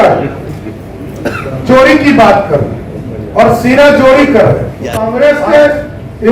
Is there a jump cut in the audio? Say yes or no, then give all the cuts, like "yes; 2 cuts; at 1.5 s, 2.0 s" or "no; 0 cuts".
yes; 1 cut; at 5.0 s